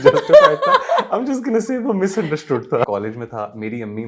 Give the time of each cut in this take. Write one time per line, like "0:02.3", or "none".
0:02.9

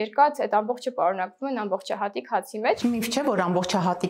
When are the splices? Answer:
0:02.8

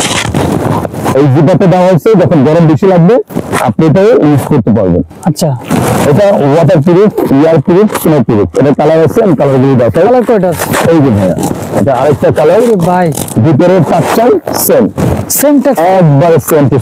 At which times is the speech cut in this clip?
none

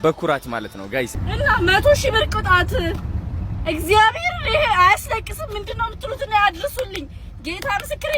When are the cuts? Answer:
0:01.1

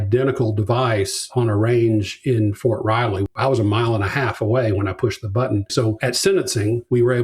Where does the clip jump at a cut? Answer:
0:03.2
0:05.7

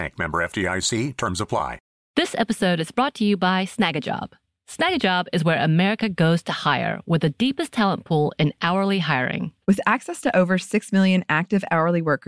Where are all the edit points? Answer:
none

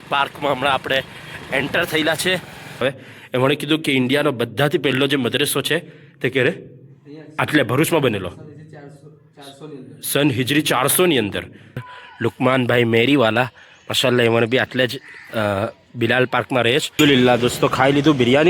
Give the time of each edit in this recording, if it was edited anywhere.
0:02.8
0:11.9
0:17.0

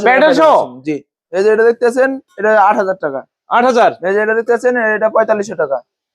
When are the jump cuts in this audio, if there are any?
0:01.2

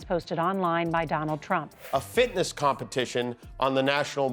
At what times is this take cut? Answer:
0:01.8

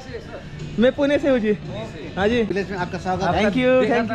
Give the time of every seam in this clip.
0:02.5

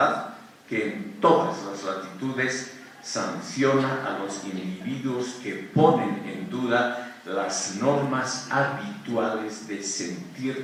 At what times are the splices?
none

